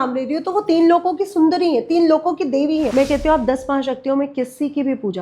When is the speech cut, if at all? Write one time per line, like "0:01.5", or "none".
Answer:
0:02.9